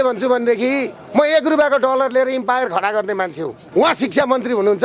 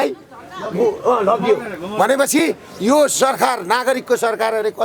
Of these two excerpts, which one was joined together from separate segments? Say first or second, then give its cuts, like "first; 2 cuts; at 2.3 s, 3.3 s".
first; 1 cut; at 3.6 s